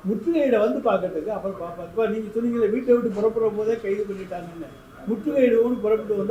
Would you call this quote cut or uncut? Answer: uncut